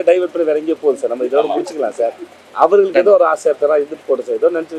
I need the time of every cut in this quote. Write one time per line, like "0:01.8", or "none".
none